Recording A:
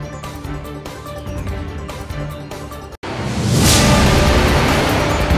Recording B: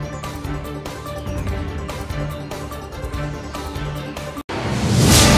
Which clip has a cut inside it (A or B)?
A